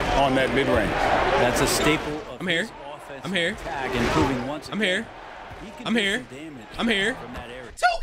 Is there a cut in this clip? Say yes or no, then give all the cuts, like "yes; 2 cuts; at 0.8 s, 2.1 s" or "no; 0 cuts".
no; 0 cuts